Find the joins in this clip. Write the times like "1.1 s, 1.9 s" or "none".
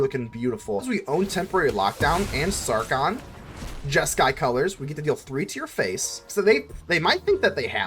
0.9 s, 6.3 s